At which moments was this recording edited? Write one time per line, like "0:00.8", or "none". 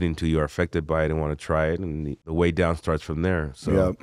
0:02.2

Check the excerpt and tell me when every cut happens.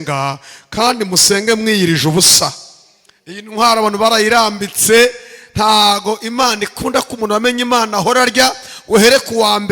0:08.7

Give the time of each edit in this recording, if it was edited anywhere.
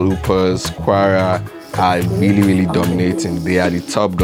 none

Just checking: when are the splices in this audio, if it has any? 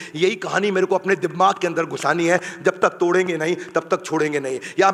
none

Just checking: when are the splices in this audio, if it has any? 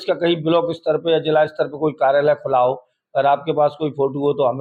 none

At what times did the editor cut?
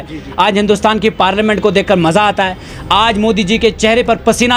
none

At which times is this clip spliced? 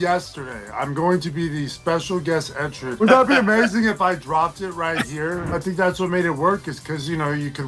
0:03.0
0:05.6

